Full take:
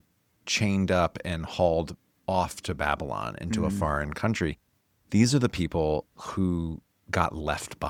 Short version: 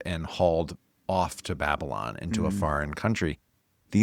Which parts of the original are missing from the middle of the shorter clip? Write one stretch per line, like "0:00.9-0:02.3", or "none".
none